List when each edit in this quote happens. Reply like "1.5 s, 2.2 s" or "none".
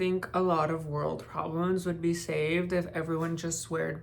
none